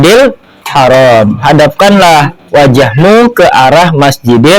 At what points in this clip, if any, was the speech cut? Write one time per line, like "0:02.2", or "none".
none